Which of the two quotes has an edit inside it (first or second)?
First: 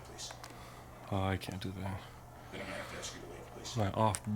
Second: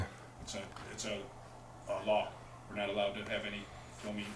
second